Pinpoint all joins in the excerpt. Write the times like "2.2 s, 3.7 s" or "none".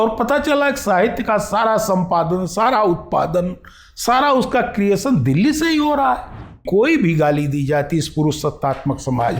6.6 s